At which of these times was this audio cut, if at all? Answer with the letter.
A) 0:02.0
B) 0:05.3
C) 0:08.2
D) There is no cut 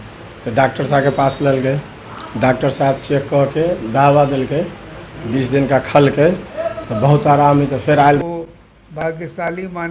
C